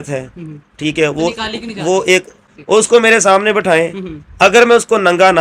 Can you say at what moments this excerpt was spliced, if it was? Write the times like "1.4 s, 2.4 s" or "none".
2.5 s